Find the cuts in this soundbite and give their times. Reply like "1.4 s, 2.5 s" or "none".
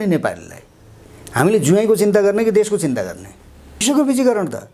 3.8 s